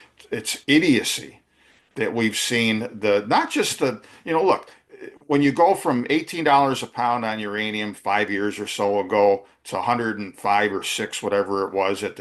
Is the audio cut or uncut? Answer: uncut